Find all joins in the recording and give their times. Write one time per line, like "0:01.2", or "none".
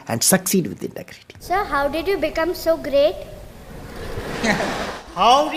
0:01.4